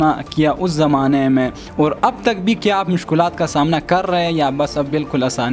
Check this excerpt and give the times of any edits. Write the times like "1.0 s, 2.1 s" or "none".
none